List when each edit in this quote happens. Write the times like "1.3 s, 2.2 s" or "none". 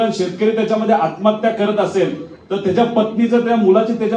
none